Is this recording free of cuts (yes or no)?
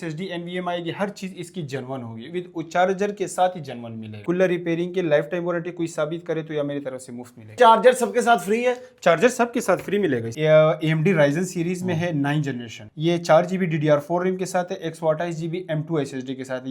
no